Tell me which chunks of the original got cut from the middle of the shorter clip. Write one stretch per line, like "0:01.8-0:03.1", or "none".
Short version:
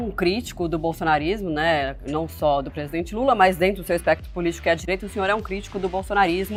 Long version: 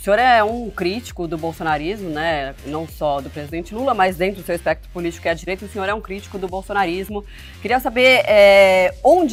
none